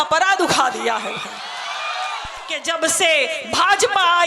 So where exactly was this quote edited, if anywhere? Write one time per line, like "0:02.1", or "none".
0:02.5